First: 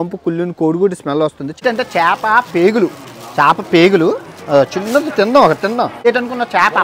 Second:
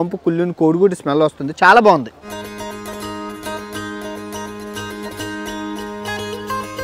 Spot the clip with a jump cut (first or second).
first